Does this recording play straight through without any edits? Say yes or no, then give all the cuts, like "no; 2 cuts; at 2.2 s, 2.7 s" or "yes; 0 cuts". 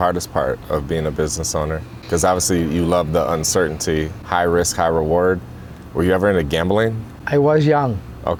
yes; 0 cuts